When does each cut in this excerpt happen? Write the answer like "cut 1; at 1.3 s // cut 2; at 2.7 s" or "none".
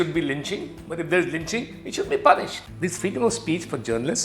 cut 1; at 2.9 s